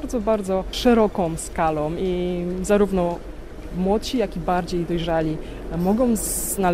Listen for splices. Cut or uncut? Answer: uncut